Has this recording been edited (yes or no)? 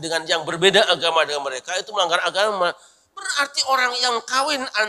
no